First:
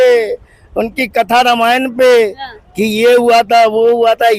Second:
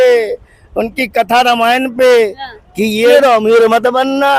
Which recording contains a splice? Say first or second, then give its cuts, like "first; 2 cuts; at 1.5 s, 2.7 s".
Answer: second; 1 cut; at 3.1 s